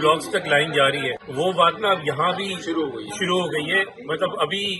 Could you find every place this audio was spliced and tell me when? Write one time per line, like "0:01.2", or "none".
none

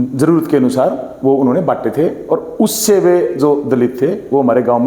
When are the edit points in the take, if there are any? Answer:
none

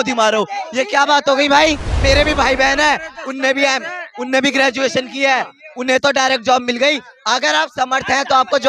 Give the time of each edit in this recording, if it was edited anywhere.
0:02.0

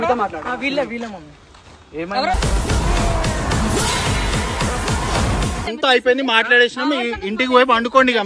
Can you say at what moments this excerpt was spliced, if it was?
0:05.7

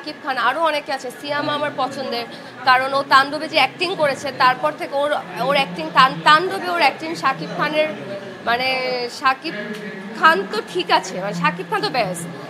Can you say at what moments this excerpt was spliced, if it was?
none

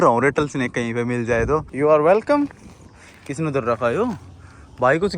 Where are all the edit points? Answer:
0:01.7

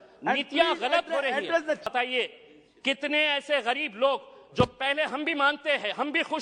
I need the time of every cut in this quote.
0:01.9

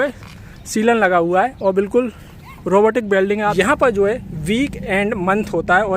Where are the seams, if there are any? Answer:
0:03.5

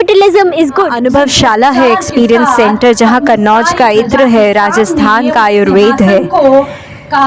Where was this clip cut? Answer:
0:00.9

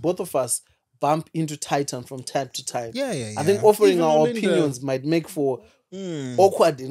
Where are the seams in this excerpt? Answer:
none

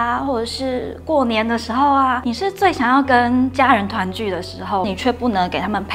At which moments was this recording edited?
0:02.2
0:04.9

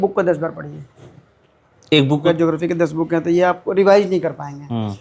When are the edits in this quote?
0:02.2

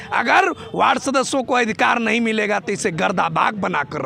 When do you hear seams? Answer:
none

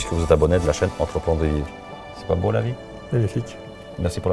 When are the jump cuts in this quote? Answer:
none

